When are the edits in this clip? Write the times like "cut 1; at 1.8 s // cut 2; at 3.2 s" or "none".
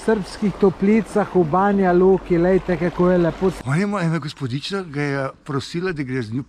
cut 1; at 3.6 s